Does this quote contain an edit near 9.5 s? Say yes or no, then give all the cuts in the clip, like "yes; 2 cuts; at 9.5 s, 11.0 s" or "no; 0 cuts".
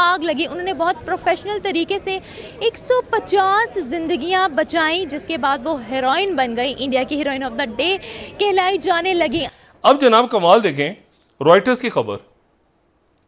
yes; 1 cut; at 9.5 s